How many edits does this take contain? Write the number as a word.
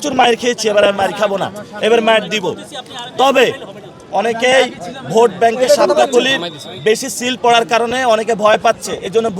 zero